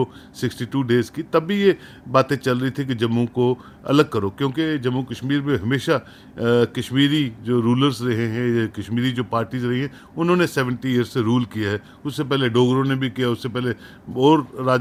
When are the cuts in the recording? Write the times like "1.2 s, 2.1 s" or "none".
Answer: none